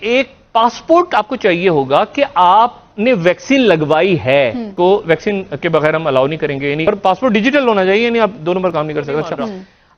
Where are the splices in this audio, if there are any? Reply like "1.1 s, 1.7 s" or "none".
4.6 s, 6.9 s